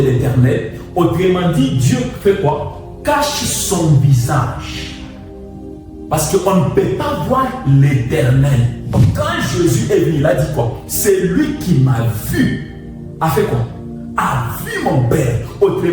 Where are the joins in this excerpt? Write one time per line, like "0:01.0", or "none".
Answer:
0:09.1